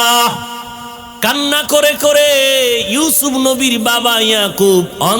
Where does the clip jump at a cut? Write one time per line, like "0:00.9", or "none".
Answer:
0:01.0